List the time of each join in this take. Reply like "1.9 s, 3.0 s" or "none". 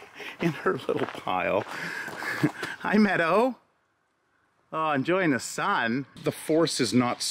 6.2 s